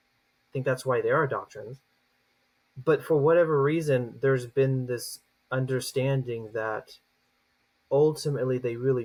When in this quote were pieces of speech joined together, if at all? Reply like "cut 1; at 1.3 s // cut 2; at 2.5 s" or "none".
none